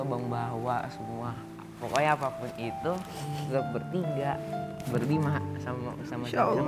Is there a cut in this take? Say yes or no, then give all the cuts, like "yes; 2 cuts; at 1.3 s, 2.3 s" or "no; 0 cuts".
no; 0 cuts